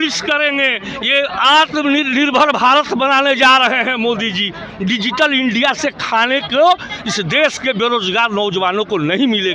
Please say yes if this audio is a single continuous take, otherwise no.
yes